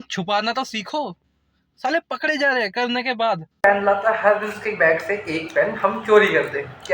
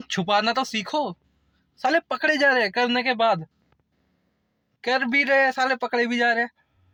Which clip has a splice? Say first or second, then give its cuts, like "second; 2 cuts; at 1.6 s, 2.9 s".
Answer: first; 1 cut; at 3.6 s